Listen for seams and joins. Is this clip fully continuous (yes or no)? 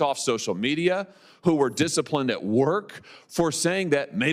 yes